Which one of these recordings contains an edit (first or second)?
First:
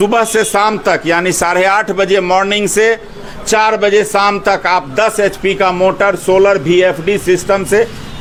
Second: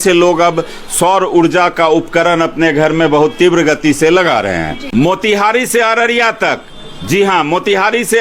second